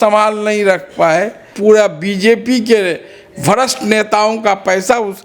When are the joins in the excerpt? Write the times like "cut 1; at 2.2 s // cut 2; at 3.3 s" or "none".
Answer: cut 1; at 1.5 s